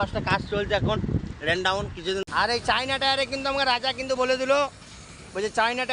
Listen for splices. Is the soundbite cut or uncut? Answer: cut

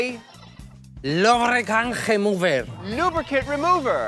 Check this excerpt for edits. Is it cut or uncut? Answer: uncut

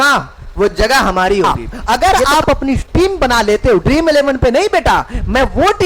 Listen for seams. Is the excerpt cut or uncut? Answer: cut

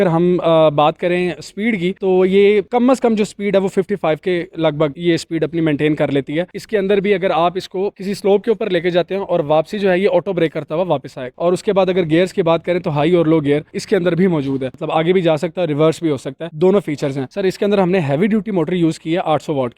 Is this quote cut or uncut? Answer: cut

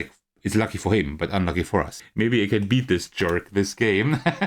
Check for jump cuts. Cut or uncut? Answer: cut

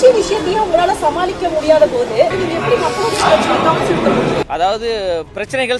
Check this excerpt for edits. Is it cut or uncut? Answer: cut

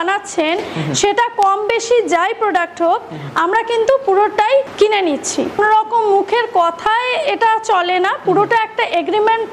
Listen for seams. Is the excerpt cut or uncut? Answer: cut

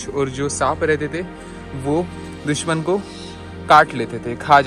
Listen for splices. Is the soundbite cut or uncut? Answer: uncut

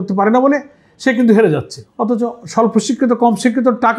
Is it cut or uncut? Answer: uncut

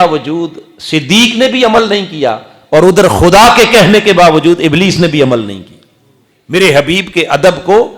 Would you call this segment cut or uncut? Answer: cut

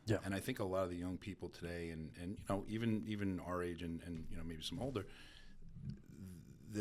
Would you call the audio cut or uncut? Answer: uncut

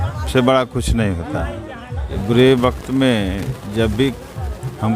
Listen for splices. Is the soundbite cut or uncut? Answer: cut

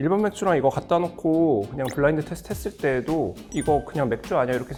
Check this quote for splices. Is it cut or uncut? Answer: uncut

